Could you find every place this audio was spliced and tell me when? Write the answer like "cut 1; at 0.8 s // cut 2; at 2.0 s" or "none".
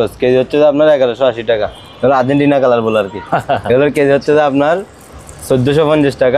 cut 1; at 1.8 s